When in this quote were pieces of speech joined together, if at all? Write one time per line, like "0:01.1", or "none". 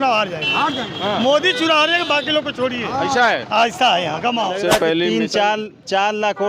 0:04.5